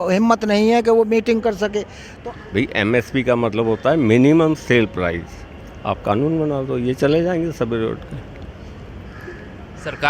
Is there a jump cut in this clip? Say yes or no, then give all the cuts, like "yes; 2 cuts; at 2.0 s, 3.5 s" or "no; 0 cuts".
yes; 1 cut; at 2.0 s